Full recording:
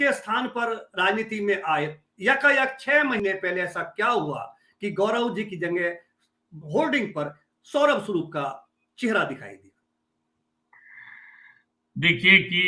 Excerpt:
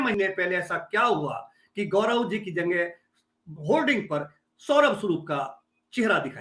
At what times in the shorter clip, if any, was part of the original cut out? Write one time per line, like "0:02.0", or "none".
none